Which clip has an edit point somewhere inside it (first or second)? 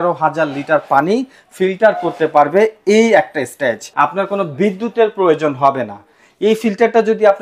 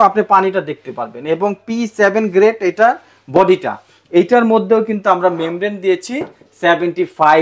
first